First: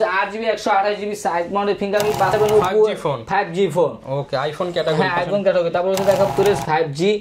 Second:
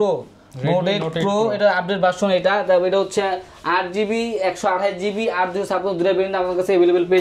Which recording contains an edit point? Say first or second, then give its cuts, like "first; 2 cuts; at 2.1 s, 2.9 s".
first; 2 cuts; at 2.4 s, 6.3 s